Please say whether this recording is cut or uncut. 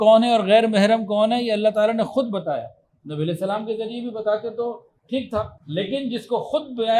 cut